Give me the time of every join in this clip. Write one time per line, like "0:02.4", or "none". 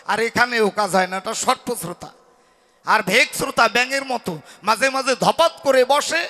none